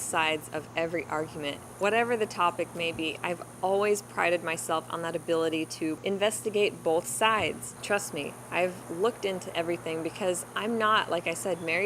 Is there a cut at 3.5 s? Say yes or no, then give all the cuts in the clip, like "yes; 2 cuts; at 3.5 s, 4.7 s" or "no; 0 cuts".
no; 3 cuts; at 1.7 s, 6.0 s, 7.7 s